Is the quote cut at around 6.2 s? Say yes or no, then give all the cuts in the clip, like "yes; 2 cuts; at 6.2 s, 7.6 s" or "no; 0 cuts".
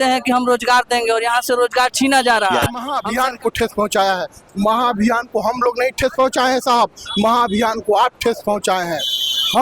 no; 1 cut; at 3.0 s